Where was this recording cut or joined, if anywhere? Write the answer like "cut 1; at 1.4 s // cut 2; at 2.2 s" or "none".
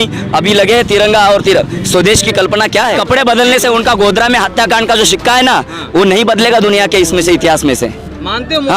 cut 1; at 3.0 s